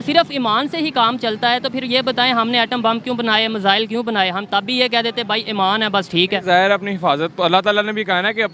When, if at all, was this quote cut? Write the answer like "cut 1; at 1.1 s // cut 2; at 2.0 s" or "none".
none

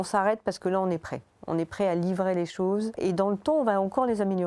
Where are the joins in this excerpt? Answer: cut 1; at 3.0 s

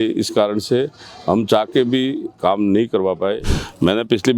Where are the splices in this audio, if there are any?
cut 1; at 3.5 s

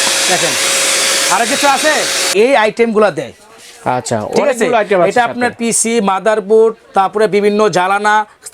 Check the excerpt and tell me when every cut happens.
cut 1; at 2.3 s

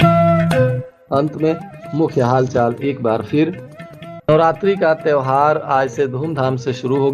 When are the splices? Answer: none

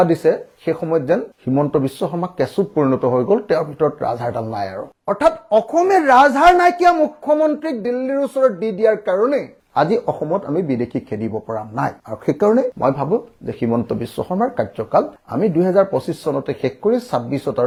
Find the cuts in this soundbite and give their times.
none

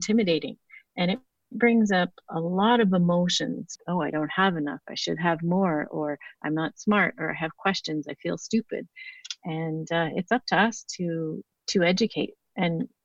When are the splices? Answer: none

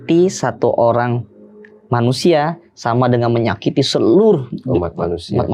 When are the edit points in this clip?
none

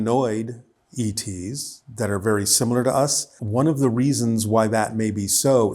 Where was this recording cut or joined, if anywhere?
cut 1; at 3.3 s

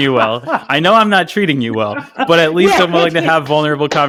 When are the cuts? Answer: none

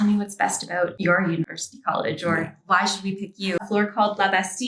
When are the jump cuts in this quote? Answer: cut 1; at 3.6 s

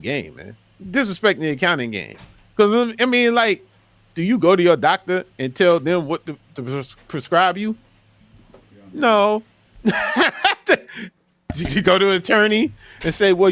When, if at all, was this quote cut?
none

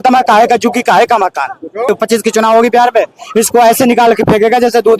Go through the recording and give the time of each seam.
cut 1; at 1.9 s

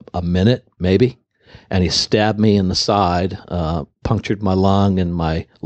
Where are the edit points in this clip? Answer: none

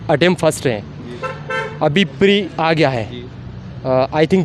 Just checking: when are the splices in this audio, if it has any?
none

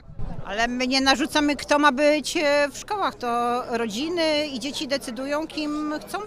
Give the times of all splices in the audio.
none

